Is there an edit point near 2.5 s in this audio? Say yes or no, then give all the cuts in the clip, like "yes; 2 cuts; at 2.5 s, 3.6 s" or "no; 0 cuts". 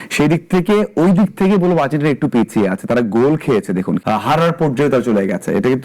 no; 1 cut; at 4.0 s